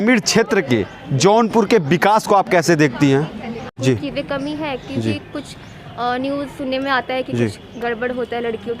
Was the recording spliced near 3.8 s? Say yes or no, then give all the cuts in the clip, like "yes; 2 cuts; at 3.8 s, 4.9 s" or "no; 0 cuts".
yes; 1 cut; at 3.8 s